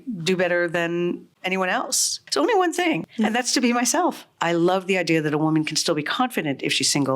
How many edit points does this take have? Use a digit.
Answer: 3